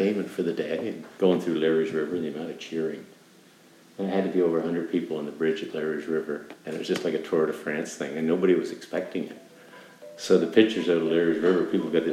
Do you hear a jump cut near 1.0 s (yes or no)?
yes